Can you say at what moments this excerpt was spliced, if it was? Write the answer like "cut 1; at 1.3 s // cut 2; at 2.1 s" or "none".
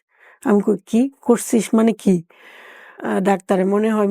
cut 1; at 3.0 s